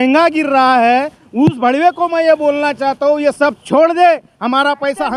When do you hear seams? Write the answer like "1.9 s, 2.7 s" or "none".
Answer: none

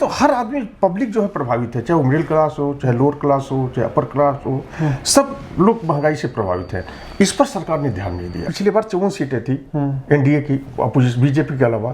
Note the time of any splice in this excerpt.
8.5 s

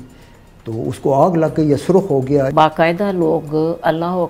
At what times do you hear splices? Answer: 2.5 s

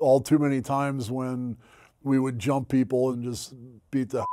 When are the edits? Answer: 3.1 s

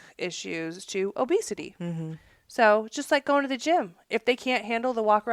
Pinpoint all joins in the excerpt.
none

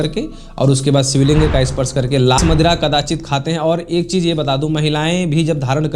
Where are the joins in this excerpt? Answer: 2.4 s

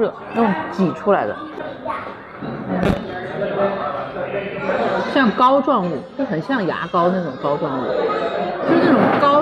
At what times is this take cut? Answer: none

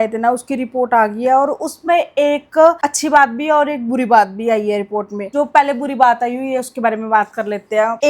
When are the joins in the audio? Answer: none

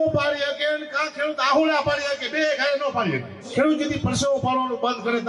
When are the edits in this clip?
3.5 s

